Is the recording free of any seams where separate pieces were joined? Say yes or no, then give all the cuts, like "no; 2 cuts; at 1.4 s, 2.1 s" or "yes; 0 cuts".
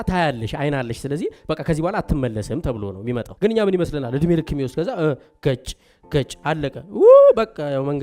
no; 1 cut; at 3.3 s